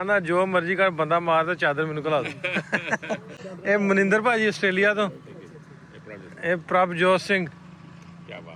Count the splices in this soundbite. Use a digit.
0